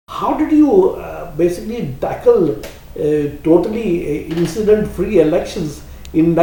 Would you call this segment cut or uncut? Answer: uncut